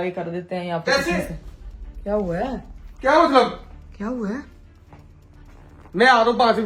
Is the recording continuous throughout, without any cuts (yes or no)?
yes